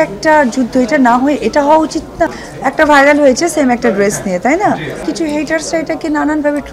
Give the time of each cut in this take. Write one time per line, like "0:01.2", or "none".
0:02.3
0:05.0

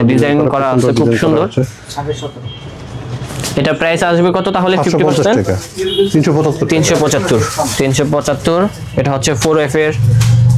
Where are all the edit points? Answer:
none

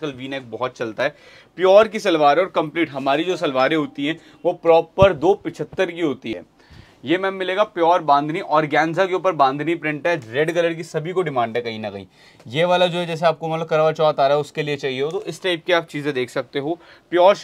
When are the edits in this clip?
0:06.3

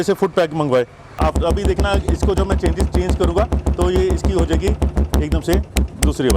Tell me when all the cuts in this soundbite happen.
0:01.2

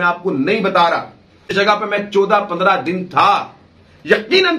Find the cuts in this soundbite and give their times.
0:01.5

